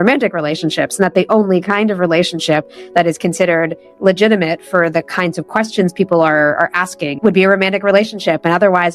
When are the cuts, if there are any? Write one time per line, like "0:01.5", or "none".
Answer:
none